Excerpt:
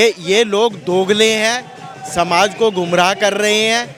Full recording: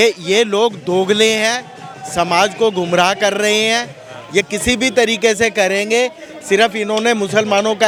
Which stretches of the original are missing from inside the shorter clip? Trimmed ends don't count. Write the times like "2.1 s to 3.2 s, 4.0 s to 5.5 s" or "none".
none